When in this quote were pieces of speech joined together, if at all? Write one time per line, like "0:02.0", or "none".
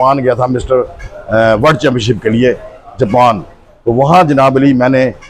none